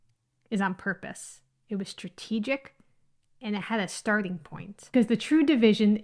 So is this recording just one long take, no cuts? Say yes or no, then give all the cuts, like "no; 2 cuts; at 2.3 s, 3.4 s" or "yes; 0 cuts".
no; 1 cut; at 4.8 s